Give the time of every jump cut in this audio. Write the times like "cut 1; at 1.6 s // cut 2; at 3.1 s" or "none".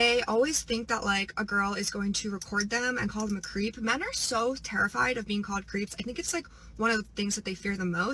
none